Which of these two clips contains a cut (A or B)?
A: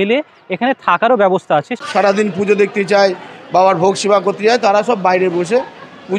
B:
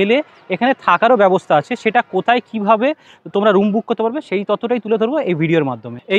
A